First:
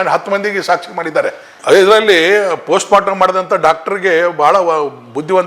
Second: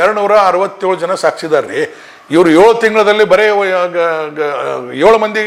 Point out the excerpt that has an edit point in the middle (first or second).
first